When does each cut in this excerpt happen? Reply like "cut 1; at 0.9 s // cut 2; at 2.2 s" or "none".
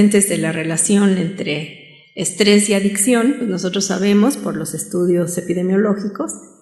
none